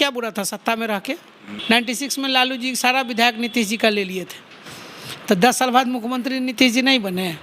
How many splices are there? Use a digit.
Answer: 1